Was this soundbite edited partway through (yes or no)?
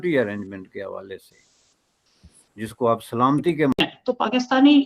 yes